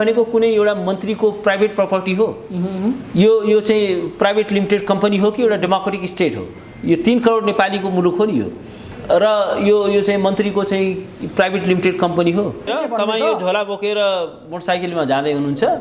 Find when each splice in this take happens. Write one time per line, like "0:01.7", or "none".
0:12.7